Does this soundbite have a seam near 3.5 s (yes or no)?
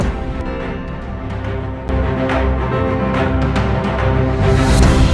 no